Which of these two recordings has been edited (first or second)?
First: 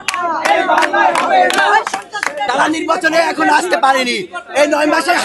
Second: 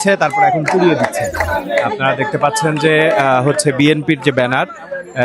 first